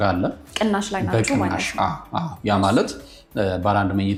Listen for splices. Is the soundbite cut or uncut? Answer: uncut